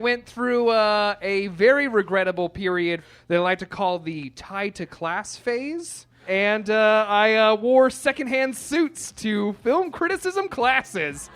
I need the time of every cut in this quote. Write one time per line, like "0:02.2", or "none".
0:03.0
0:06.2